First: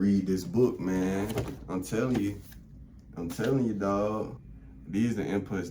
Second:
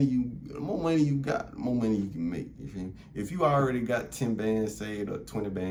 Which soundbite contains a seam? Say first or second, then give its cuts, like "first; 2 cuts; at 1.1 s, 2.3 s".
first; 1 cut; at 4.3 s